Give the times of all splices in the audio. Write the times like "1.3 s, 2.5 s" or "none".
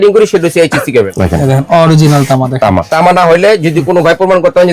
1.1 s, 2.9 s